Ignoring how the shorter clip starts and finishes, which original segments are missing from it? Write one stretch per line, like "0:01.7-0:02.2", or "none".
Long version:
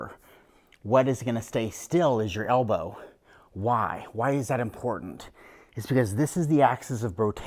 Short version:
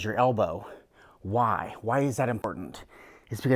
0:04.8-0:04.9